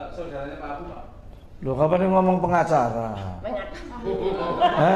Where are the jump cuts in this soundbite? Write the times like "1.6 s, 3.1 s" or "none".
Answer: none